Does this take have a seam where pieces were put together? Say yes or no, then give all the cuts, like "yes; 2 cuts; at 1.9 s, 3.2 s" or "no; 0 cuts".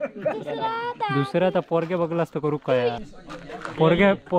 yes; 1 cut; at 3.0 s